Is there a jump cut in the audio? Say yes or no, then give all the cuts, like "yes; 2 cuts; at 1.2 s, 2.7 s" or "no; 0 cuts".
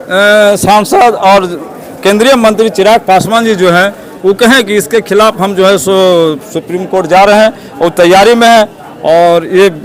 no; 0 cuts